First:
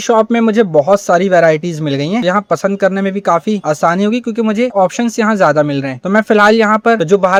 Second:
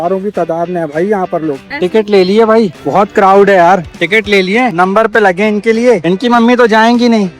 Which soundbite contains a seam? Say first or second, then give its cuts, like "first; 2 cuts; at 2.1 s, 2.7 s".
second; 2 cuts; at 1.7 s, 4.0 s